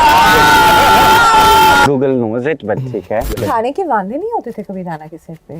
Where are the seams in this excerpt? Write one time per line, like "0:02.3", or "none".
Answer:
0:01.9
0:03.4